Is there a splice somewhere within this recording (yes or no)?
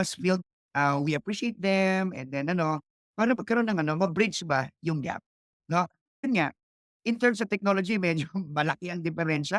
no